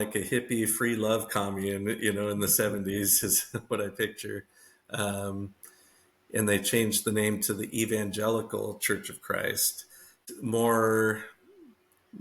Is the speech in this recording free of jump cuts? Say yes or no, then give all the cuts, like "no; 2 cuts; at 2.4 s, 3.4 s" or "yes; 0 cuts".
no; 1 cut; at 10.2 s